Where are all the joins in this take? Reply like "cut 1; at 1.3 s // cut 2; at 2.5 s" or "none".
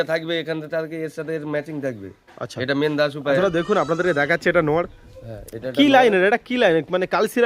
cut 1; at 3.4 s